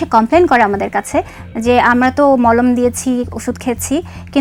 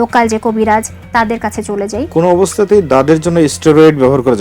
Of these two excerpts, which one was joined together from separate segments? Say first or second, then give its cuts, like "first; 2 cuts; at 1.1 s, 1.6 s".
second; 1 cut; at 2.1 s